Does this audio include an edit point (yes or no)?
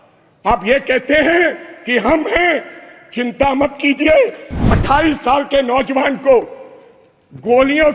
yes